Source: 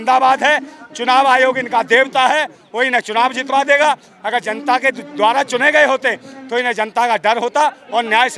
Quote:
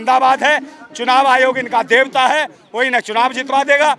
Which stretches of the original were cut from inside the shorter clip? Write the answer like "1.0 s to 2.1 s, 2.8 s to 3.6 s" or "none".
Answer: none